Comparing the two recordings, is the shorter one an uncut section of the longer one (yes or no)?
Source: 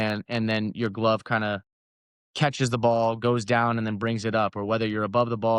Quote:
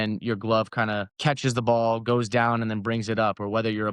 no